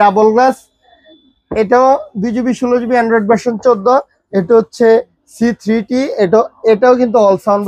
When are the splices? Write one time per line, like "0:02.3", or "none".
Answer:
none

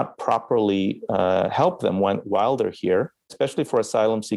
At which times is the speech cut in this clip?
0:03.3

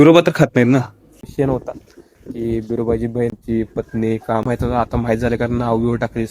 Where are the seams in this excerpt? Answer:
0:01.3
0:03.4
0:04.5

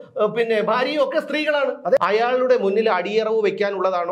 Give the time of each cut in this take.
0:02.0

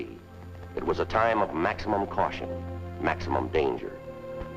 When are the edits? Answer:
0:02.4

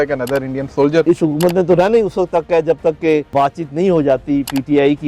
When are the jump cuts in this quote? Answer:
0:01.0
0:03.3

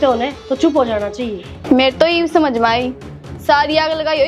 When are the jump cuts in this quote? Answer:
0:01.5

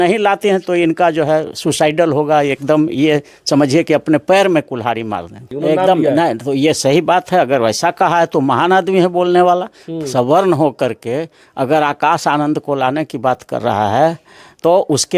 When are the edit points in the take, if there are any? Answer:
none

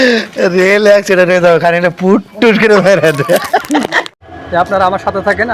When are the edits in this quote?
0:04.2

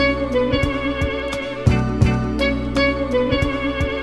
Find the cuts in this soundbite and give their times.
0:00.9

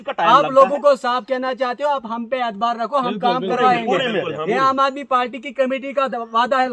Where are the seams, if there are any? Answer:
none

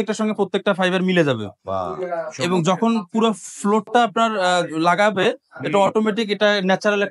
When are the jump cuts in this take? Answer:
none

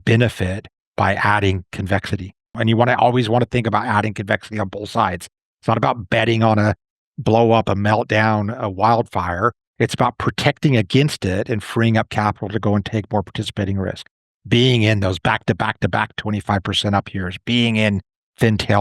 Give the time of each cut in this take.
0:02.5

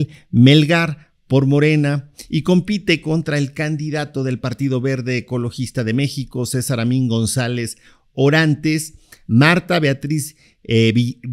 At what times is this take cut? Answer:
none

